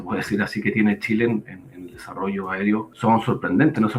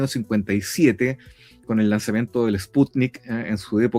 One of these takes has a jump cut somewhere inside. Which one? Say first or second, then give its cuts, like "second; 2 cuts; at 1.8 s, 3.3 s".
first; 1 cut; at 2.9 s